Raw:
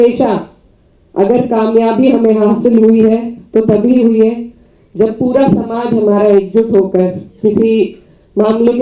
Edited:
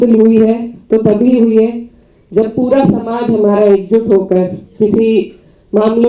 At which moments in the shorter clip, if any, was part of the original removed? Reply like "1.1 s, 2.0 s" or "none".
none